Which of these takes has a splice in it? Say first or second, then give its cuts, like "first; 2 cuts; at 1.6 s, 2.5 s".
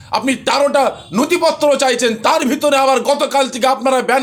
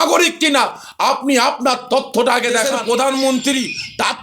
second; 1 cut; at 2.7 s